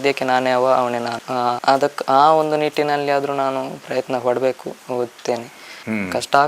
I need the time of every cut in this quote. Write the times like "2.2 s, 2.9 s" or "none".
none